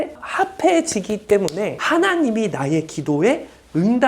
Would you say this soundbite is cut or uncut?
cut